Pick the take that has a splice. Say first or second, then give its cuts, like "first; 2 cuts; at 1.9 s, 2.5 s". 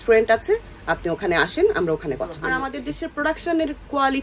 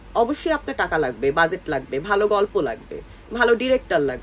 first; 1 cut; at 2.4 s